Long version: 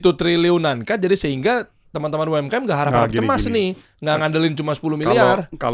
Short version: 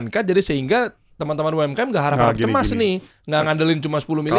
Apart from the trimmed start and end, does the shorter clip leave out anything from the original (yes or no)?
no